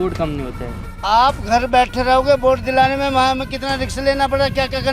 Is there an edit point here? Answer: yes; 1 cut; at 0.9 s

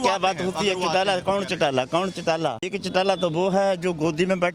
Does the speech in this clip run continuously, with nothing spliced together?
no; 1 cut; at 2.8 s

